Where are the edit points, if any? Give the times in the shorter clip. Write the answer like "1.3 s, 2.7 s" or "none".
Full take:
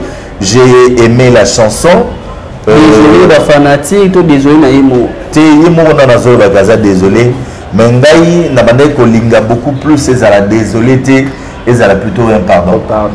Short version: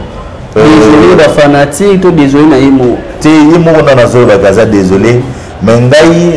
none

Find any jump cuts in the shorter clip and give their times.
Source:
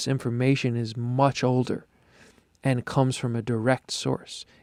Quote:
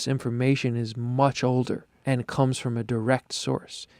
1.9 s

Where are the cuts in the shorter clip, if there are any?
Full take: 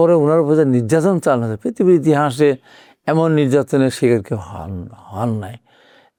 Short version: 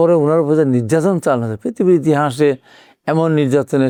none

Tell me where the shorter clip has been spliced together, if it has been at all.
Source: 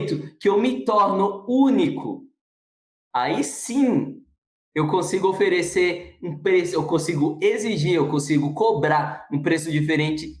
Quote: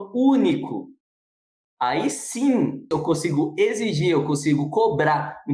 2.9 s

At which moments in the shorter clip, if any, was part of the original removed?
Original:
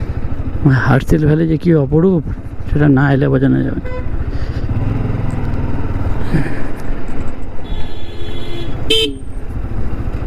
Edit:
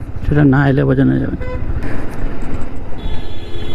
1.8 s

